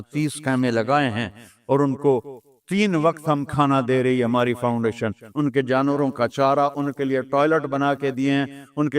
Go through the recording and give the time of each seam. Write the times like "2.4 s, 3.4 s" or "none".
5.2 s